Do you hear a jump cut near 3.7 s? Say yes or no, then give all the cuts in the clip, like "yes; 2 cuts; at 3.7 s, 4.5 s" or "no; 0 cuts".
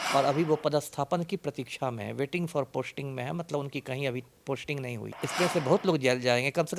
no; 1 cut; at 5.1 s